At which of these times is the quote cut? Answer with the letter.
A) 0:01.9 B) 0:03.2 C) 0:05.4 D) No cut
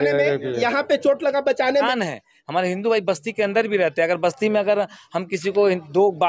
A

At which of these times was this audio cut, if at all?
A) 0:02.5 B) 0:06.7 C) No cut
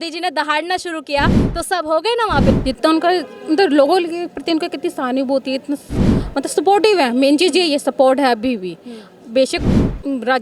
A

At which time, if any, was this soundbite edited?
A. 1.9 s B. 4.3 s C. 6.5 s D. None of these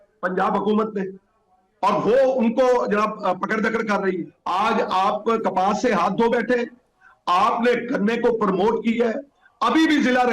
B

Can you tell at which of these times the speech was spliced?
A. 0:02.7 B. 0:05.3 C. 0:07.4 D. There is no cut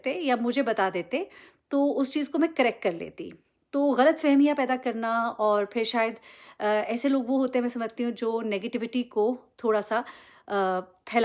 D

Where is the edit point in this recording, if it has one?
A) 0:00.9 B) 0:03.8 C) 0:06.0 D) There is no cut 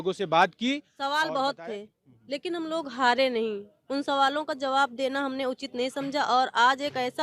A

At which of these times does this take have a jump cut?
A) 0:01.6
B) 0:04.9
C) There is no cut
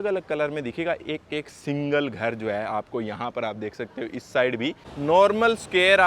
B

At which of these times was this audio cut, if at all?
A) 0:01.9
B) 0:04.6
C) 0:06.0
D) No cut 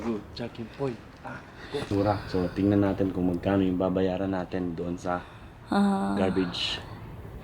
A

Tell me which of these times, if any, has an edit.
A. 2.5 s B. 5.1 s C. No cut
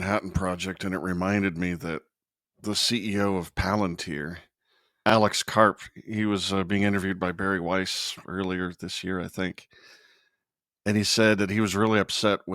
B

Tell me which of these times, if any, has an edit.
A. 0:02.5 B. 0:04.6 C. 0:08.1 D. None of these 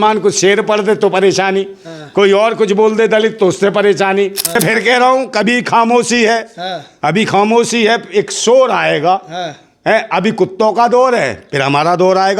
B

